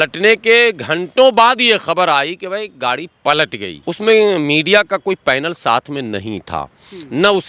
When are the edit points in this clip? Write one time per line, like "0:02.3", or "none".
0:03.7